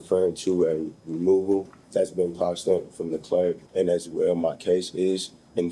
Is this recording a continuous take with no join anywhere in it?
no; 2 cuts; at 1.8 s, 3.6 s

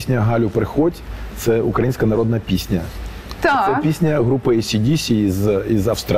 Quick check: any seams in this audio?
no; 0 cuts

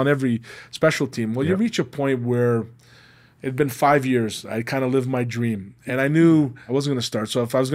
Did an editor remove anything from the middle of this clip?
yes; 1 cut; at 6.6 s

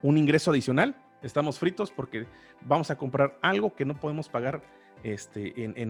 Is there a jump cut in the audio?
no; 0 cuts

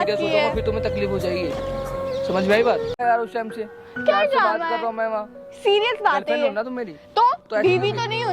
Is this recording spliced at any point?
yes; 1 cut; at 2.9 s

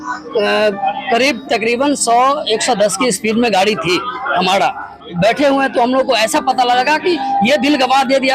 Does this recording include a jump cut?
yes; 1 cut; at 5.1 s

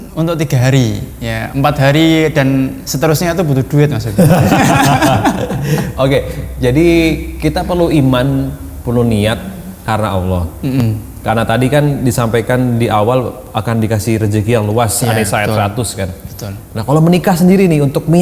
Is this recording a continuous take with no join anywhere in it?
yes; 0 cuts

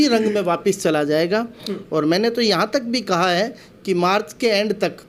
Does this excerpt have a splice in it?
no; 0 cuts

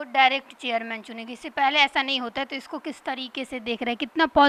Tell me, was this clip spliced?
no; 0 cuts

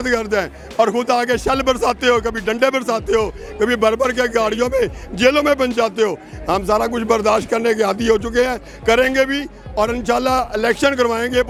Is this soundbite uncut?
yes; 0 cuts

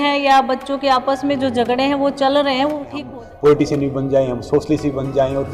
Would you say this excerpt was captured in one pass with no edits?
no; 1 cut; at 3.0 s

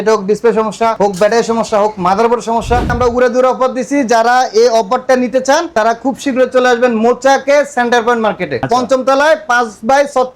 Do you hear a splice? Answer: yes; 2 cuts; at 2.9 s, 8.6 s

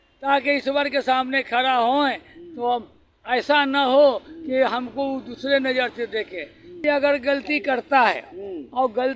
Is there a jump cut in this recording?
yes; 1 cut; at 6.8 s

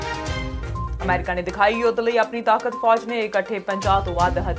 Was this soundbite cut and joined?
yes; 1 cut; at 0.9 s

